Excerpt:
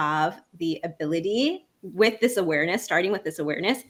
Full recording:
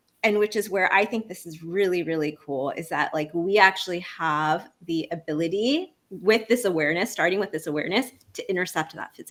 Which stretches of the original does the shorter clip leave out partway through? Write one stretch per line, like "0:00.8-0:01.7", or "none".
none